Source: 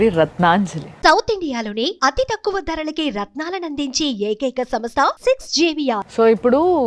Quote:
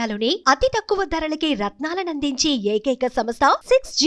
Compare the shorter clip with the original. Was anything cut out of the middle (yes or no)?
no